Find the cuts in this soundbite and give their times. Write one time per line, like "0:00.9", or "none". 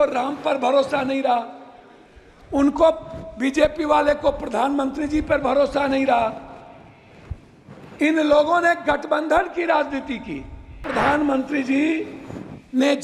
0:10.9